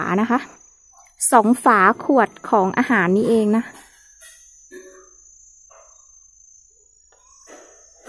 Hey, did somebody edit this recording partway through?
no; 0 cuts

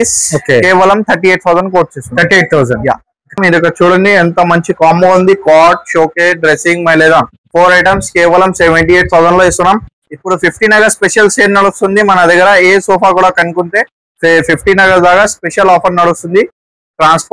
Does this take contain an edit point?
yes; 2 cuts; at 3.4 s, 10.0 s

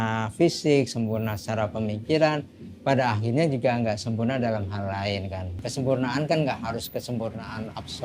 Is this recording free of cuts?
no; 1 cut; at 5.6 s

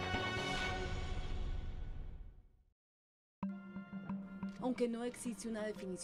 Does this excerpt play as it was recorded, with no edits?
yes; 0 cuts

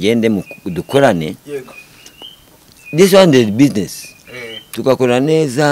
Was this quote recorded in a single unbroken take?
yes; 0 cuts

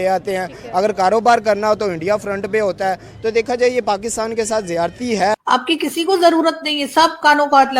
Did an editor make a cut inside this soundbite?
yes; 1 cut; at 5.4 s

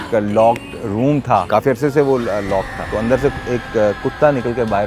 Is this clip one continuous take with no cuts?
no; 2 cuts; at 1.5 s, 2.8 s

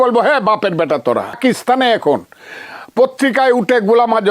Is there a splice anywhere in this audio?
yes; 1 cut; at 1.4 s

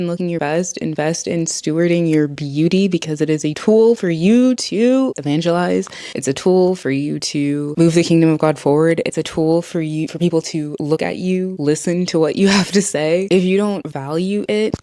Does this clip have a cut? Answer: no; 0 cuts

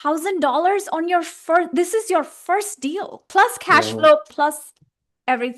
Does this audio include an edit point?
yes; 2 cuts; at 3.2 s, 4.2 s

